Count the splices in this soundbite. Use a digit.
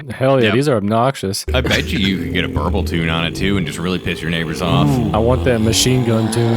1